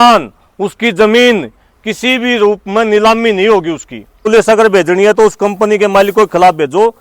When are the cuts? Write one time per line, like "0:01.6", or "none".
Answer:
0:04.3